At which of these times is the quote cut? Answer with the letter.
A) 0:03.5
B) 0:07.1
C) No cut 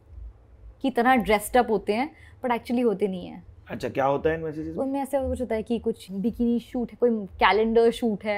C